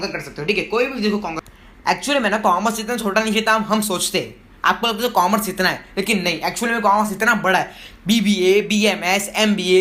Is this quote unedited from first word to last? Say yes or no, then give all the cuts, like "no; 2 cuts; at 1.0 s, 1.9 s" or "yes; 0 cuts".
no; 1 cut; at 1.5 s